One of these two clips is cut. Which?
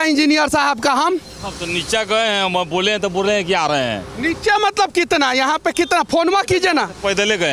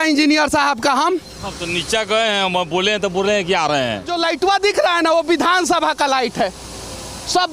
second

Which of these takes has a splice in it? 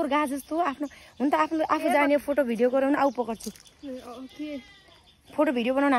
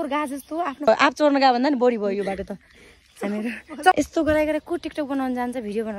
second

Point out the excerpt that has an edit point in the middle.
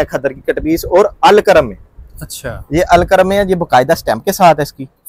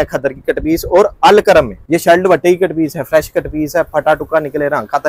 second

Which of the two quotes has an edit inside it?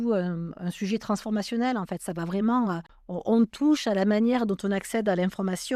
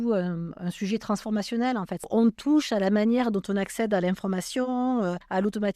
second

